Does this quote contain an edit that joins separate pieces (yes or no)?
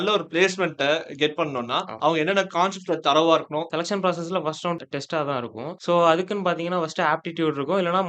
yes